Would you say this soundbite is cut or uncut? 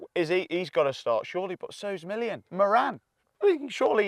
cut